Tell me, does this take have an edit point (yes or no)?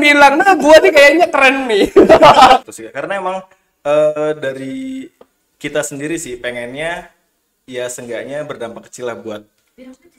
yes